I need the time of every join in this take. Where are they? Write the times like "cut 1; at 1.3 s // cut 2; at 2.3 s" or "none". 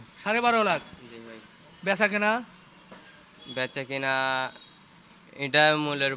none